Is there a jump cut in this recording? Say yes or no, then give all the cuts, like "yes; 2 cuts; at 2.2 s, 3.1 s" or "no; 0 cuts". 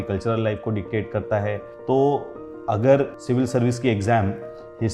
yes; 2 cuts; at 1.7 s, 3.2 s